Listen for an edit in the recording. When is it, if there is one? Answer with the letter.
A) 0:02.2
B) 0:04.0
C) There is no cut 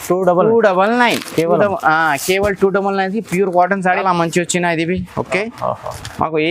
B